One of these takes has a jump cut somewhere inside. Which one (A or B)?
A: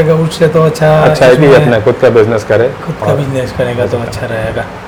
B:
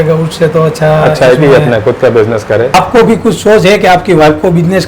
B